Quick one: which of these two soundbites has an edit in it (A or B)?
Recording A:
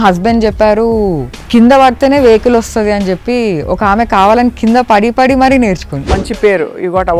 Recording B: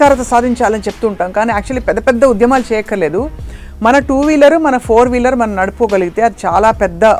A